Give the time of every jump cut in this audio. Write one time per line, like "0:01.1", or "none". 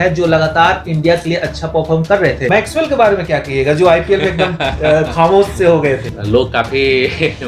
0:02.5
0:06.1